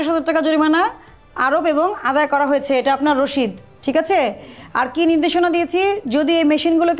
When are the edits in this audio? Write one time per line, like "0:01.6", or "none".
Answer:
none